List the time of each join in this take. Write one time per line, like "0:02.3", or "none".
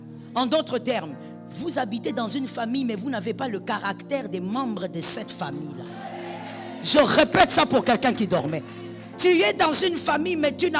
none